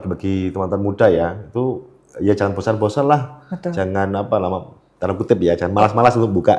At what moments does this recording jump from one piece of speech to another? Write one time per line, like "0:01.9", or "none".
none